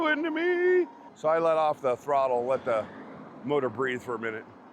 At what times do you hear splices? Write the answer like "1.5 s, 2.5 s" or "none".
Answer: 1.0 s